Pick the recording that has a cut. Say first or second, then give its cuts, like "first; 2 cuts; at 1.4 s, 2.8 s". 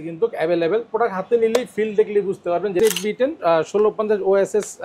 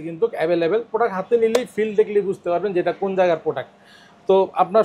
first; 1 cut; at 2.8 s